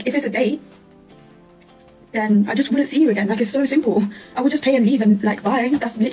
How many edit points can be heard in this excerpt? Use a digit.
1